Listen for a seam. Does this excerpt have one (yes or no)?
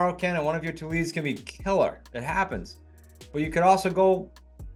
no